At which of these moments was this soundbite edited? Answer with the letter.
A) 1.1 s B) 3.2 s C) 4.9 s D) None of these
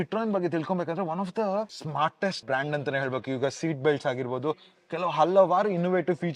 D